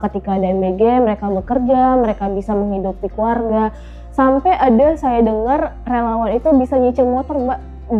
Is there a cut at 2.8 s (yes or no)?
no